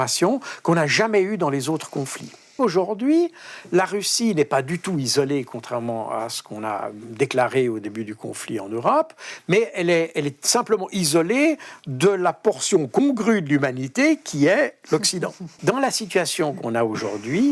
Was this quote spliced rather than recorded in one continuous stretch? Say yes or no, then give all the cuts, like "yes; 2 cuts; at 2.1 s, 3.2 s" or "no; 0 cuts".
yes; 2 cuts; at 2.6 s, 15.5 s